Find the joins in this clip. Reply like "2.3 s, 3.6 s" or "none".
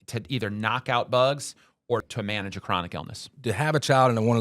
2.0 s, 3.3 s